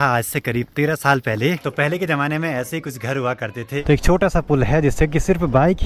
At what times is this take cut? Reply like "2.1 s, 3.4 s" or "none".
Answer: 1.6 s, 3.8 s